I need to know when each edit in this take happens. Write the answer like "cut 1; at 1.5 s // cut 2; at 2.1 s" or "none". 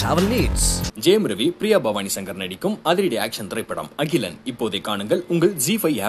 none

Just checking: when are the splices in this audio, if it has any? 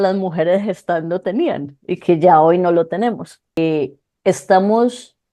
cut 1; at 3.6 s

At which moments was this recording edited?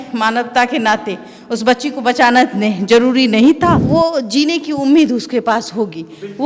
cut 1; at 3.8 s

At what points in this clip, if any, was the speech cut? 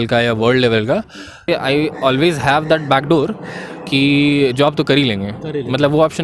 cut 1; at 1.5 s

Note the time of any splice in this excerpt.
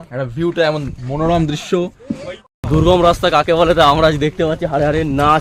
cut 1; at 2.5 s

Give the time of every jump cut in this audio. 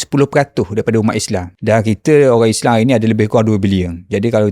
cut 1; at 1.5 s

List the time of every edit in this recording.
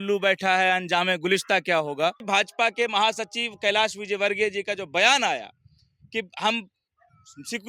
cut 1; at 2.3 s

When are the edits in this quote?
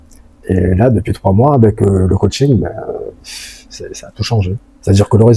none

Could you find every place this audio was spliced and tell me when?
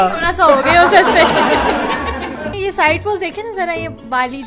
cut 1; at 2.5 s

